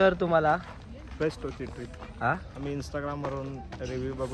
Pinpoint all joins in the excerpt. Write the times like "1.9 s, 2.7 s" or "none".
none